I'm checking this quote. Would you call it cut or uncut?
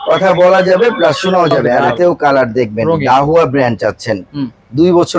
cut